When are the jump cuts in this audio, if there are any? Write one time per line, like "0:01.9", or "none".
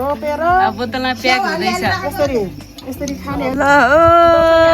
0:03.5